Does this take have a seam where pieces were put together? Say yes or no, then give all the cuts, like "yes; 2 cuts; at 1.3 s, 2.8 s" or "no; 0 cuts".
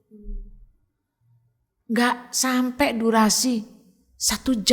no; 0 cuts